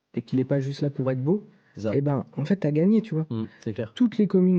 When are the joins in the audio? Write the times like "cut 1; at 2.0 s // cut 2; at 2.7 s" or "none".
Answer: none